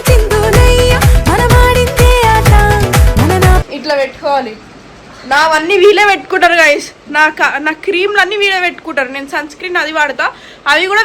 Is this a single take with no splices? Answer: no; 1 cut; at 3.7 s

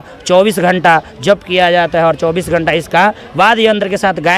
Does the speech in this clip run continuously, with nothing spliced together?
yes; 0 cuts

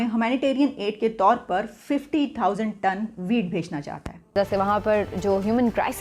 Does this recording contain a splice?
yes; 1 cut; at 4.3 s

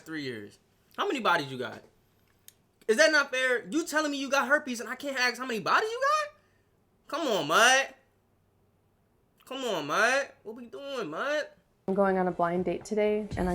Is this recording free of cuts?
no; 1 cut; at 11.9 s

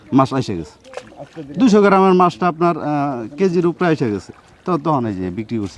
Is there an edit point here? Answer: no; 0 cuts

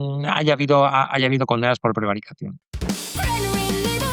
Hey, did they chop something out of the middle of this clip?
yes; 1 cut; at 3.1 s

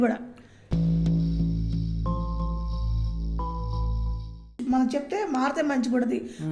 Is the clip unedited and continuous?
no; 1 cut; at 4.5 s

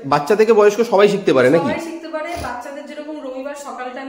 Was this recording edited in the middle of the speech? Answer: no; 0 cuts

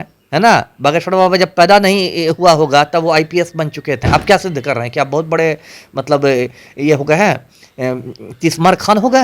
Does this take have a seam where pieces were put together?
yes; 1 cut; at 4.0 s

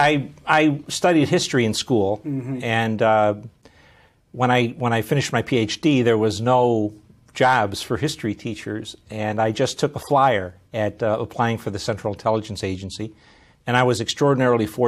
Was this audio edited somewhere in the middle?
no; 0 cuts

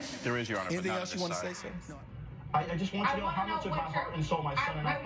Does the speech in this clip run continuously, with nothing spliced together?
no; 1 cut; at 1.7 s

